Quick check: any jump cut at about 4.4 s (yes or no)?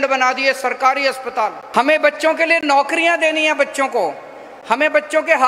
no